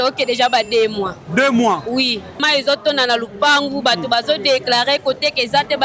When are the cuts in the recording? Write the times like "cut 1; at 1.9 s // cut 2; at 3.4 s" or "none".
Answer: cut 1; at 2.4 s